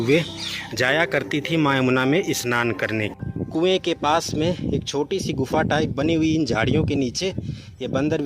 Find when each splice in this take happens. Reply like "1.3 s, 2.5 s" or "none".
3.2 s